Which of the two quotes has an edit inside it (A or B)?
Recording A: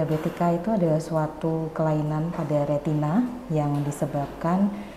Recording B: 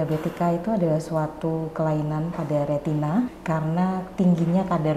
B